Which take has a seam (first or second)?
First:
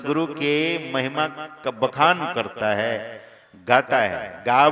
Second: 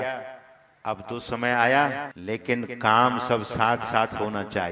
second